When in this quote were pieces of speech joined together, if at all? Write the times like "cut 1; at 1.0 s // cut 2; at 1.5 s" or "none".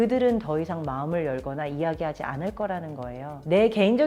none